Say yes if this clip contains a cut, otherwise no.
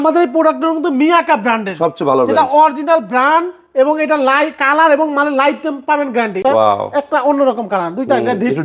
yes